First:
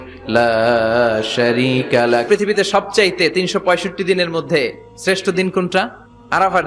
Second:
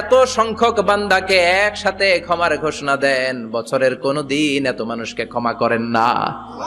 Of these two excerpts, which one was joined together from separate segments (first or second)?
first